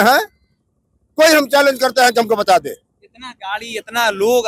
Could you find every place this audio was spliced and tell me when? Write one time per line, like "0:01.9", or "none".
none